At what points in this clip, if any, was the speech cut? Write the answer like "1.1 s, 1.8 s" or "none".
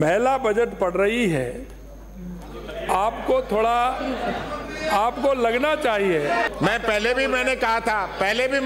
6.5 s